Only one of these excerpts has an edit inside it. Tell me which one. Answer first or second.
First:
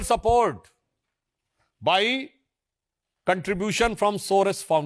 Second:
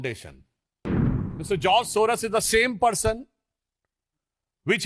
second